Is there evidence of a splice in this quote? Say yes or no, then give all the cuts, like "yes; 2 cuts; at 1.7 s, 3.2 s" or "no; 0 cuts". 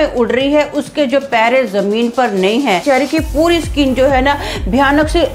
yes; 1 cut; at 2.8 s